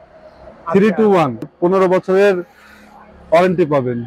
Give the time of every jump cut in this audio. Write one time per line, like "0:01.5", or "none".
0:01.5